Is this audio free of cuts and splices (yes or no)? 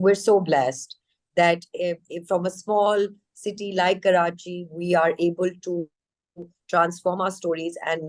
yes